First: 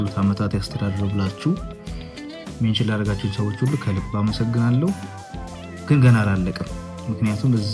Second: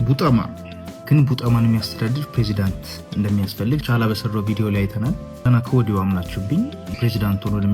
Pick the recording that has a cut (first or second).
second